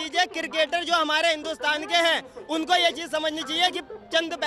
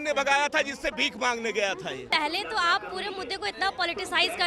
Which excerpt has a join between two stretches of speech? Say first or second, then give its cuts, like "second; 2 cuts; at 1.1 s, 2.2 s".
second; 1 cut; at 2.1 s